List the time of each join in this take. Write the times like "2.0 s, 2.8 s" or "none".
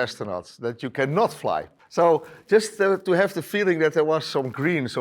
1.8 s